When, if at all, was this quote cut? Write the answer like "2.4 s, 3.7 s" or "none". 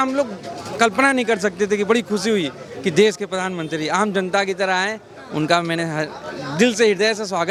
none